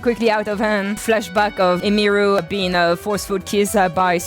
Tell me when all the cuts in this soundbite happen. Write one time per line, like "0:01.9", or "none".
0:01.0
0:02.4